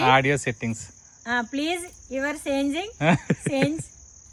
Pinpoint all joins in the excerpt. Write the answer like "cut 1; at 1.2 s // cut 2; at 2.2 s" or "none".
none